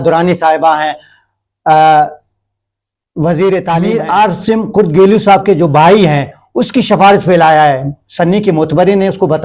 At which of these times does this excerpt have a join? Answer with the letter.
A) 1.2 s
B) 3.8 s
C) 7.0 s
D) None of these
B